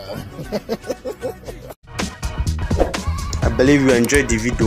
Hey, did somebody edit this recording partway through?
no; 0 cuts

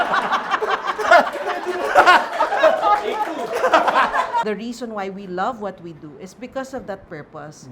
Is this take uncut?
no; 1 cut; at 4.4 s

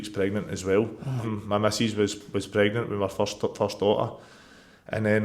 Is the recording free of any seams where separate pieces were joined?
no; 1 cut; at 1.3 s

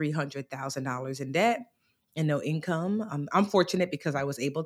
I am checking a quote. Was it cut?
no; 0 cuts

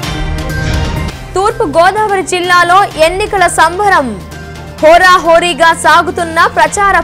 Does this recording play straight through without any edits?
no; 1 cut; at 1.0 s

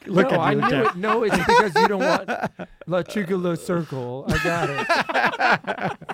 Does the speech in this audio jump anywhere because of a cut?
no; 0 cuts

